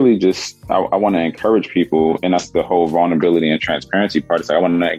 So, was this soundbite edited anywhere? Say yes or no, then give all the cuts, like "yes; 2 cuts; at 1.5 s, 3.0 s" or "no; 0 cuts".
no; 0 cuts